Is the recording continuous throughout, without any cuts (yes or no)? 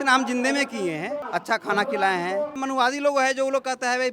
no